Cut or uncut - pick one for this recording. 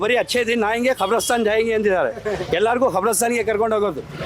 uncut